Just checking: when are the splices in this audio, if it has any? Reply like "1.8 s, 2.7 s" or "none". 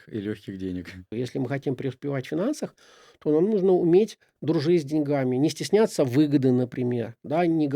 1.0 s